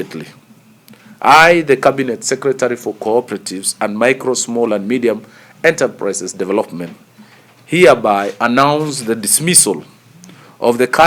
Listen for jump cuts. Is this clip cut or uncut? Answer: uncut